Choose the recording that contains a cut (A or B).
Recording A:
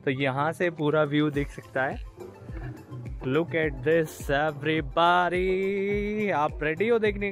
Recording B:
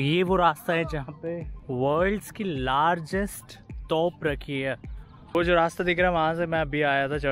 B